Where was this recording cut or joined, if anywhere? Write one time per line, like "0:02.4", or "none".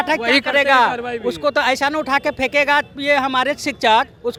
none